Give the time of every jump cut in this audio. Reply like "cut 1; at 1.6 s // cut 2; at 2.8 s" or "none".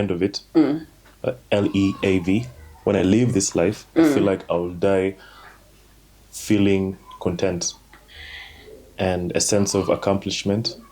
none

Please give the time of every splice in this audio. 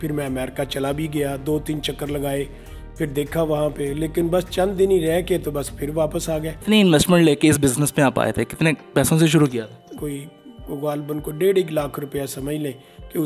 cut 1; at 6.6 s // cut 2; at 9.9 s

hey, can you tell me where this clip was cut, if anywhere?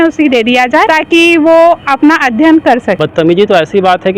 cut 1; at 0.9 s // cut 2; at 3.0 s

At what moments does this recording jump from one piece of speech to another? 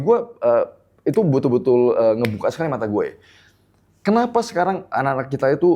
none

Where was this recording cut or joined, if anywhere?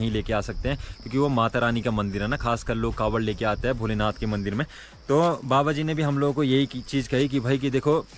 none

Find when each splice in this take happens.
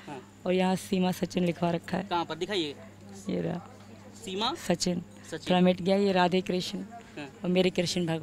none

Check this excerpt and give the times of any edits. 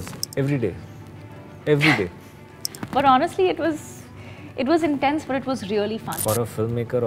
cut 1; at 6.2 s

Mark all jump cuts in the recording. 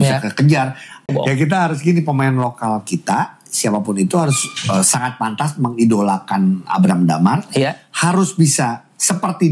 cut 1; at 1.0 s

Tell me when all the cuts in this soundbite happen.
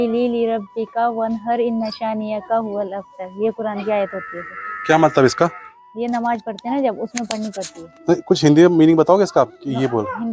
none

